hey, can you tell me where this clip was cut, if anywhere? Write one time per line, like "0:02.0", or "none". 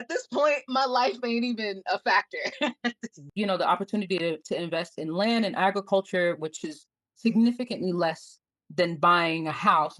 0:03.2